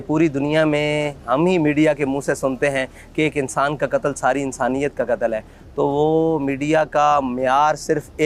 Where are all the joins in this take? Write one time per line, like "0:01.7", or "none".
none